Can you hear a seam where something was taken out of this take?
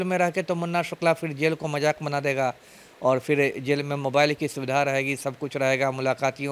no; 0 cuts

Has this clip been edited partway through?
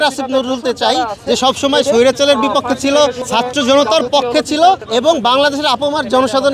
yes; 2 cuts; at 3.2 s, 4.8 s

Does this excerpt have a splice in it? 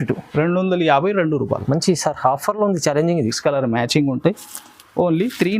yes; 1 cut; at 3.4 s

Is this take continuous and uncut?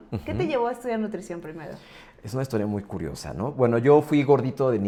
yes; 0 cuts

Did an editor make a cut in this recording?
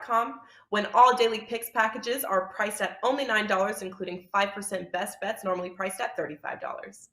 no; 0 cuts

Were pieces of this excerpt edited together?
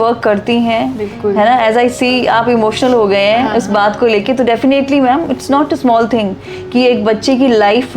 no; 0 cuts

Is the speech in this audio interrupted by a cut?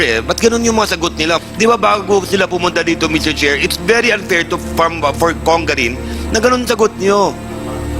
yes; 1 cut; at 1.4 s

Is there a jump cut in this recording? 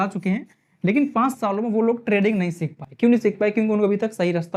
no; 0 cuts

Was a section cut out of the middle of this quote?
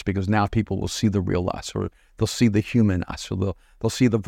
no; 0 cuts

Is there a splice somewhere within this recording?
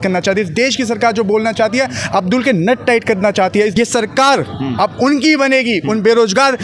yes; 1 cut; at 3.7 s

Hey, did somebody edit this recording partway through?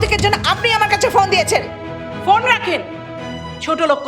no; 0 cuts

